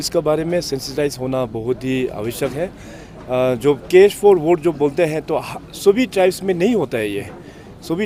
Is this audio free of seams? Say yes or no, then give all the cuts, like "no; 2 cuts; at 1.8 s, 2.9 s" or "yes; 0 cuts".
yes; 0 cuts